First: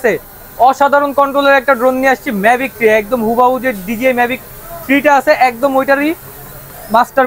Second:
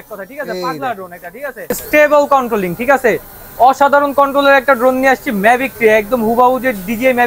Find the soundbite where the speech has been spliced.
second; 1 cut; at 1.8 s

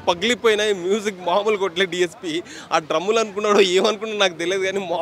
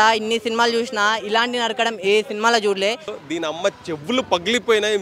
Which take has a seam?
second; 1 cut; at 3.2 s

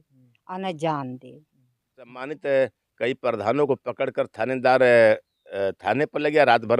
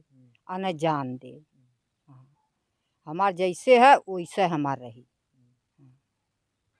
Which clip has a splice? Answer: first; 1 cut; at 2.3 s

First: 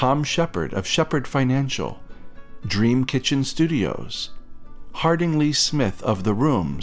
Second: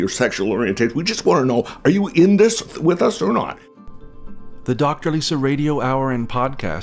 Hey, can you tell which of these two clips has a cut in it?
second; 2 cuts; at 2.7 s, 3.9 s

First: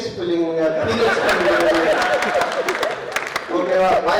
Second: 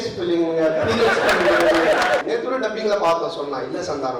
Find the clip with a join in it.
second; 1 cut; at 2.2 s

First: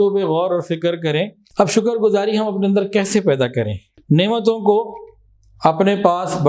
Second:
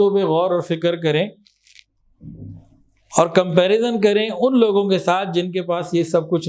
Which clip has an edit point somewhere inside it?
first; 2 cuts; at 1.4 s, 3.8 s

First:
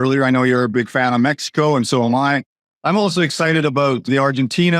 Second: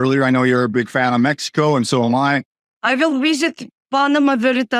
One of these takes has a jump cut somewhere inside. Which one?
first; 1 cut; at 2.7 s

